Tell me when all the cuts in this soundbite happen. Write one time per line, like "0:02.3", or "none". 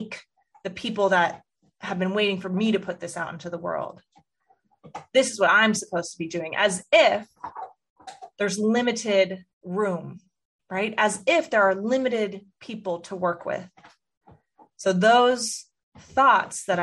0:09.5